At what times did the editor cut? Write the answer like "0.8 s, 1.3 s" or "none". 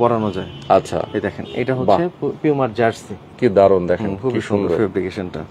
none